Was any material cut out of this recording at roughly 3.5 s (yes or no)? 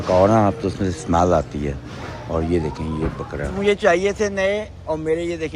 yes